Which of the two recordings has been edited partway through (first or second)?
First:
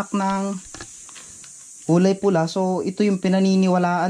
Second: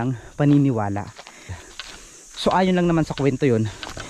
second